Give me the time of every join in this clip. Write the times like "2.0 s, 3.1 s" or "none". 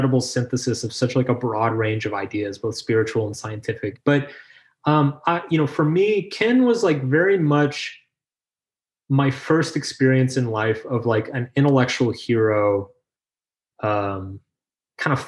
4.0 s